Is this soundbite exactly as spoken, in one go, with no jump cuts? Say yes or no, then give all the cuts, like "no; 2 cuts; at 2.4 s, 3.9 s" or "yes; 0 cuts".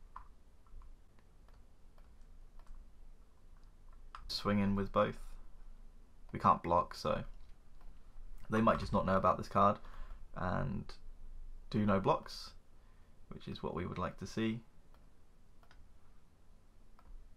no; 2 cuts; at 1.5 s, 4.4 s